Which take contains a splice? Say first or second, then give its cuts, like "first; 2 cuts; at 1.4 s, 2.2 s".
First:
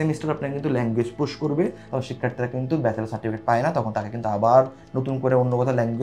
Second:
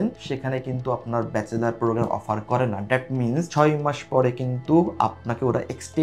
first; 1 cut; at 1.8 s